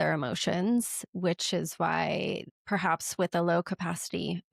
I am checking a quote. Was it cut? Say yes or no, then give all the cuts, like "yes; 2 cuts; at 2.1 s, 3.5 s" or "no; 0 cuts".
yes; 1 cut; at 2.5 s